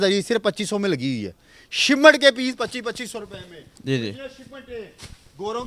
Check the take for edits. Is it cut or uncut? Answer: uncut